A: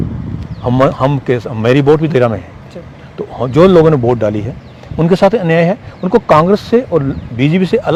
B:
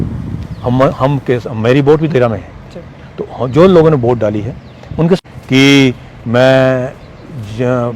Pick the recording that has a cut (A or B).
B